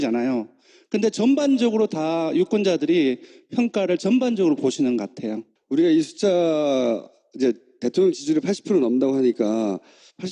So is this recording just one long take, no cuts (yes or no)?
no